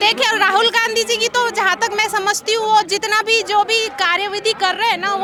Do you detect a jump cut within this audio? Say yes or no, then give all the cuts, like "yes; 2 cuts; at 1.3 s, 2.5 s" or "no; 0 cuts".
no; 0 cuts